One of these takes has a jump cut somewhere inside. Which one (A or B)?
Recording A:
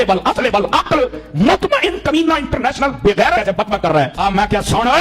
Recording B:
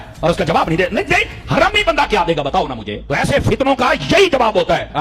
A